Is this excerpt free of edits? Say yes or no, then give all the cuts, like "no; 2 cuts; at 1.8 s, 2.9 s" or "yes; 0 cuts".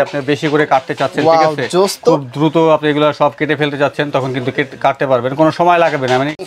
yes; 0 cuts